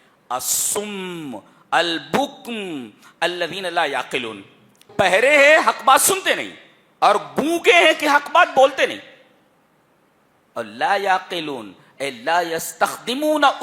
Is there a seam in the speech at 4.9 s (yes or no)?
yes